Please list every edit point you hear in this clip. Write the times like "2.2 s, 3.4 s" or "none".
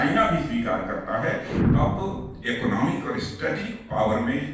1.6 s